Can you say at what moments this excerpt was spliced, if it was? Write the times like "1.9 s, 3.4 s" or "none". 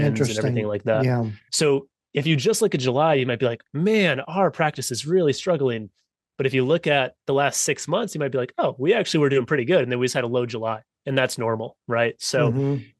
none